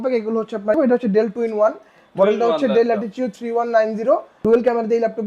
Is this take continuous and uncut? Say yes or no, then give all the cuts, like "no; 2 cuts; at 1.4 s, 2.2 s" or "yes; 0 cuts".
no; 2 cuts; at 0.8 s, 4.3 s